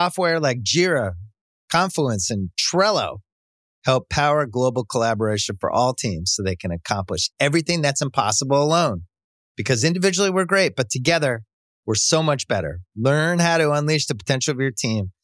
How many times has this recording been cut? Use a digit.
0